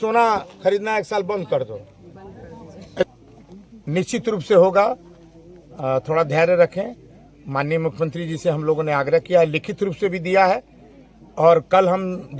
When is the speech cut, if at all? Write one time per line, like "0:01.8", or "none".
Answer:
0:03.1